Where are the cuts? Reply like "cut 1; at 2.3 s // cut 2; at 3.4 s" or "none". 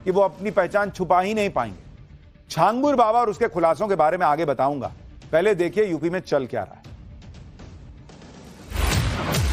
none